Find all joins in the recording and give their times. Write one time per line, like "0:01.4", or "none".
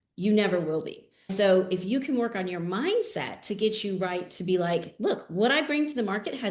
0:01.3